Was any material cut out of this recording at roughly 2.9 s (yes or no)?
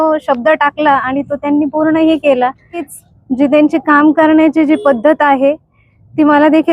yes